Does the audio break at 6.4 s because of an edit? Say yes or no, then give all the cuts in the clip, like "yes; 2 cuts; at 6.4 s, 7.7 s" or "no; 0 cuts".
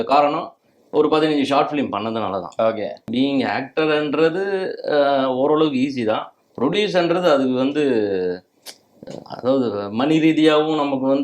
no; 1 cut; at 3.1 s